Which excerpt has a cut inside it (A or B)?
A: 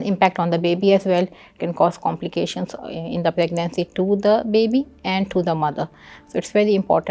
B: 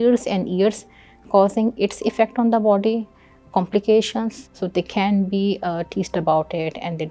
B